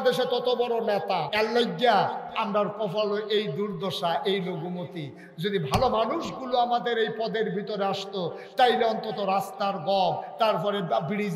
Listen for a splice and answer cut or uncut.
cut